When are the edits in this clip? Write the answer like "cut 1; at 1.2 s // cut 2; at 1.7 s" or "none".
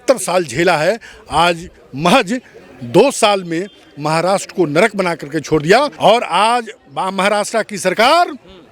cut 1; at 5.9 s